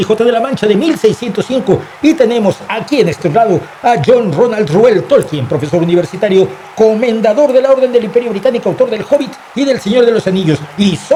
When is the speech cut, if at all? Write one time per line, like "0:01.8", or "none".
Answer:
none